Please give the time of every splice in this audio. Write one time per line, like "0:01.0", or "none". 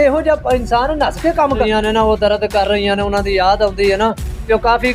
0:01.6